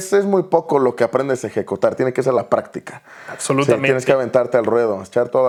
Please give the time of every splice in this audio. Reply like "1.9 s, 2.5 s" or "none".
none